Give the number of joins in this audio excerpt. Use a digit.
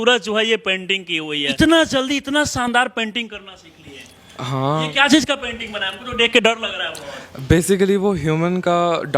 1